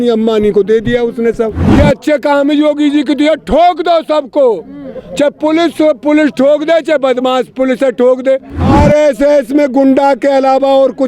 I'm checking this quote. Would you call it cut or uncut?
cut